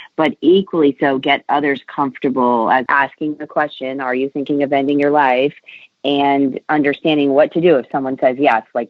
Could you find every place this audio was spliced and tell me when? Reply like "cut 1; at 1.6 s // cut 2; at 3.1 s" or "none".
cut 1; at 2.8 s